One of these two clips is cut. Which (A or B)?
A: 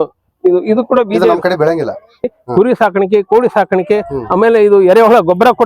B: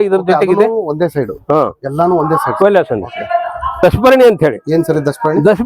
A